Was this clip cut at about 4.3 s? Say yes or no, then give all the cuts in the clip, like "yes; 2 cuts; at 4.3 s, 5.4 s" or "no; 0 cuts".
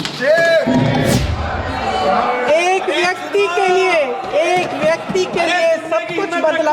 no; 1 cut; at 1.1 s